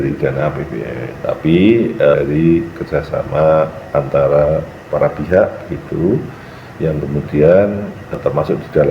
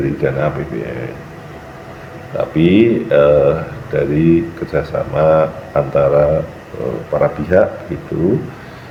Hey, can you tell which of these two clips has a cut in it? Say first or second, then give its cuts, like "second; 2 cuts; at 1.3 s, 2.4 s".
first; 4 cuts; at 1.1 s, 2.1 s, 4.8 s, 8.2 s